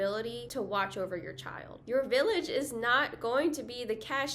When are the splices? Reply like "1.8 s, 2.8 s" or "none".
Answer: 1.8 s